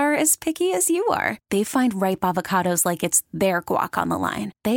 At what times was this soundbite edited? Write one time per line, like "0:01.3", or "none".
none